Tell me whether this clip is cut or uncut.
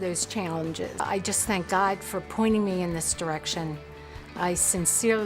cut